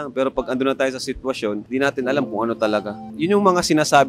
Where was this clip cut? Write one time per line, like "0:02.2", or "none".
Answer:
0:01.6
0:03.1

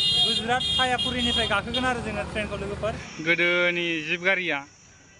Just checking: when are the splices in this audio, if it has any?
0:03.1

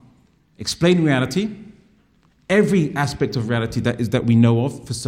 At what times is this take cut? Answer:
none

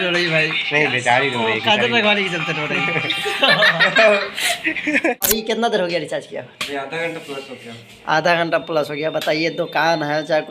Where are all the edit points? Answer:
0:05.3

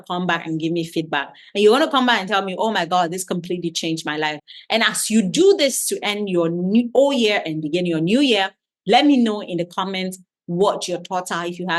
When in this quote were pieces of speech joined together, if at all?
none

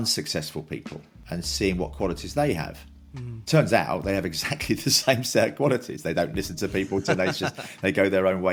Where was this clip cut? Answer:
none

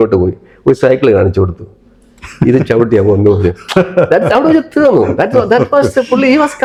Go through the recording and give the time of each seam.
none

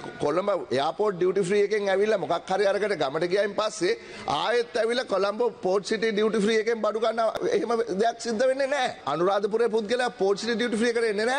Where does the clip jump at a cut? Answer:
0:07.4
0:09.0

